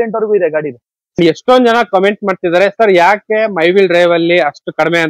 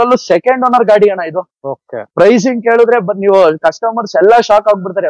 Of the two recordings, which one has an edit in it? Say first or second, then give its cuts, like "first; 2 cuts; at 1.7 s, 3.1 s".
first; 1 cut; at 1.2 s